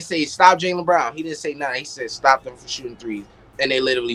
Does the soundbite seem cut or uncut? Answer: uncut